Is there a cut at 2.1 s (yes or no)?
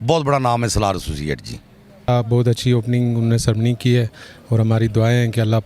yes